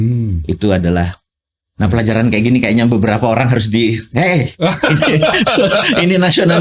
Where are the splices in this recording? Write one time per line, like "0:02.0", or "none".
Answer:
none